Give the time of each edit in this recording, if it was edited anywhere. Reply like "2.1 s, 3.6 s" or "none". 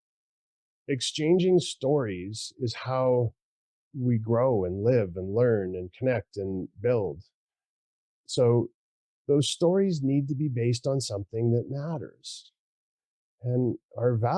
8.8 s